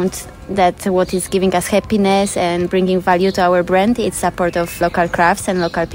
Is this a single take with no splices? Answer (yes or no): yes